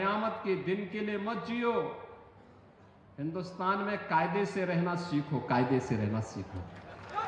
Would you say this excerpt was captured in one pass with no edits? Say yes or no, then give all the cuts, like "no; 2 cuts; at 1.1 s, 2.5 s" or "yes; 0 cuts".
yes; 0 cuts